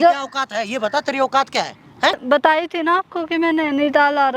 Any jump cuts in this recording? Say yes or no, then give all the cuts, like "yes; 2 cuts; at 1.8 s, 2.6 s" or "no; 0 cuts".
yes; 1 cut; at 2.2 s